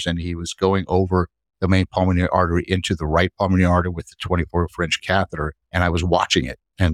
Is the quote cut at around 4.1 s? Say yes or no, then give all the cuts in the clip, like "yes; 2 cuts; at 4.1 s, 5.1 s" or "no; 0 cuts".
no; 1 cut; at 5.6 s